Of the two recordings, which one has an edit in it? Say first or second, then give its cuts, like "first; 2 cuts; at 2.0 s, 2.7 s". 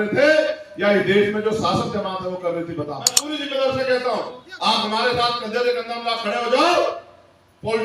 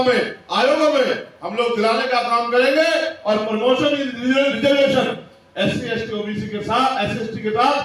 first; 1 cut; at 3.3 s